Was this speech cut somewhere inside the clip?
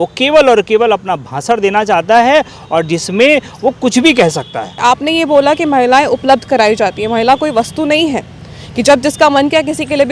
yes; 1 cut; at 4.6 s

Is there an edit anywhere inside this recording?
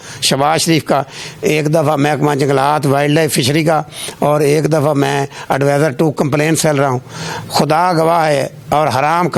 no; 0 cuts

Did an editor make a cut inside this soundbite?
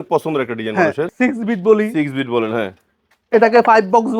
yes; 1 cut; at 1.1 s

